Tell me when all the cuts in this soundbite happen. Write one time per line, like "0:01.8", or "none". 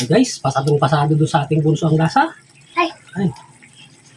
0:02.7